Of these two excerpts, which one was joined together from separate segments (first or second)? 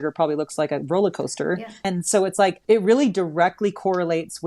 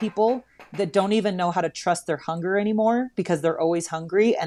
first